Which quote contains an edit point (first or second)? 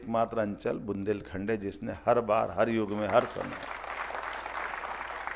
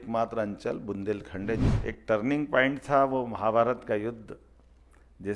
second